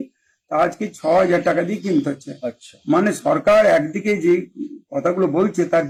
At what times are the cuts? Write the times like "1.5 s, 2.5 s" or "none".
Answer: none